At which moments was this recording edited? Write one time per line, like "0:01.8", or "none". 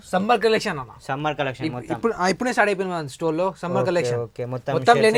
none